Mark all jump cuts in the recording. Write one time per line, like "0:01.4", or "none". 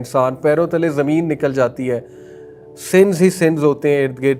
none

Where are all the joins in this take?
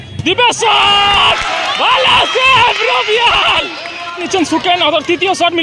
0:04.2

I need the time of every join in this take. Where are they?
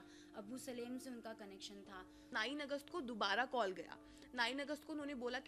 0:02.3

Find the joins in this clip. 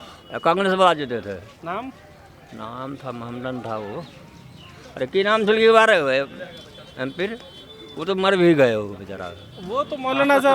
none

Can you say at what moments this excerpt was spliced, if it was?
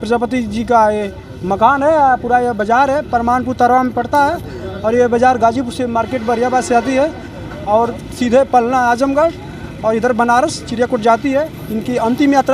none

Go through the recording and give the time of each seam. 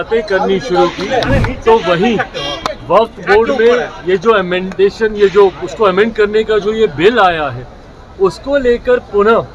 none

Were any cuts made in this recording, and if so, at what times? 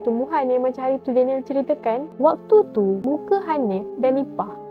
0:02.1
0:03.0

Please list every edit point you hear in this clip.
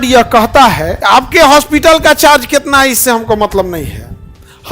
0:00.9

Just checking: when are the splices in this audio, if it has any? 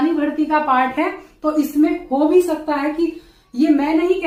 none

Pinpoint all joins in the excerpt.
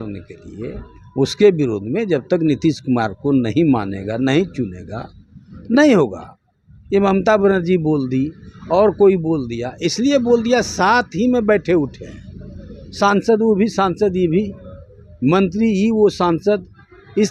none

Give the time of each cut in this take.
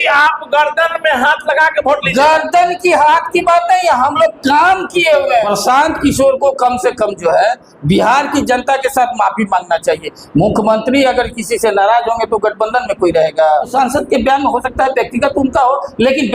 0:05.5
0:10.1
0:13.7

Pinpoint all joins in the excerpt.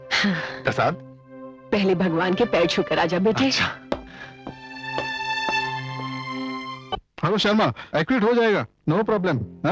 0:06.8

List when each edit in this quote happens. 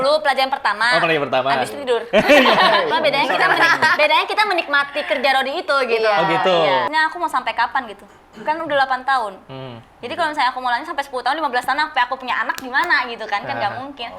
0:02.9
0:06.9

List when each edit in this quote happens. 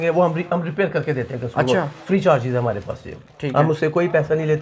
none

